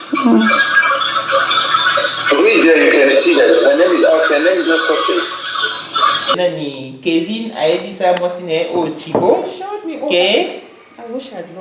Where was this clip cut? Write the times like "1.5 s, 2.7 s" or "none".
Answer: 6.3 s